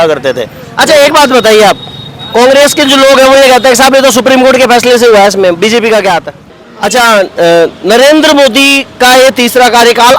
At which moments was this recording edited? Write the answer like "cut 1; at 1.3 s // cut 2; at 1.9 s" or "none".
cut 1; at 6.5 s